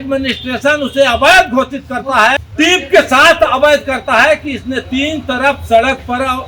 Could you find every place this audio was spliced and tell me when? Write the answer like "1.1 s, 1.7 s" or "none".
2.4 s